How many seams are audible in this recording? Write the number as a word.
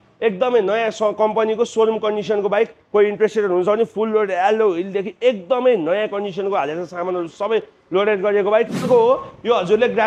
one